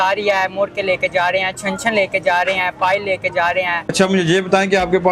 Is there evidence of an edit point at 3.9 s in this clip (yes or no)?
yes